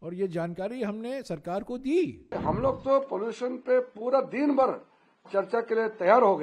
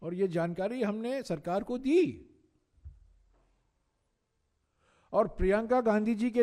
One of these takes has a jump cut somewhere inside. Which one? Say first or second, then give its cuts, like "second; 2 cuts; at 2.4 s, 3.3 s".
first; 1 cut; at 2.3 s